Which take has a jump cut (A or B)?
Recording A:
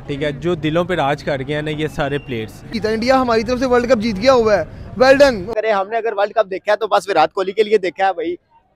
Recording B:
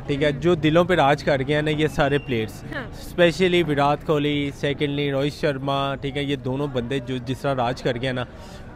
A